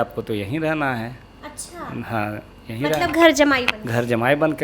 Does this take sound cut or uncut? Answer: uncut